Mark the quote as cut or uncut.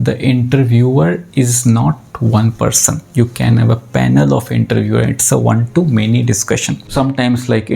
cut